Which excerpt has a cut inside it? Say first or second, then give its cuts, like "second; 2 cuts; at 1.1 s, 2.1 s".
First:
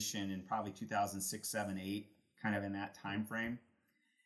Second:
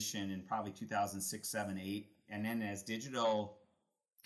second; 1 cut; at 2.3 s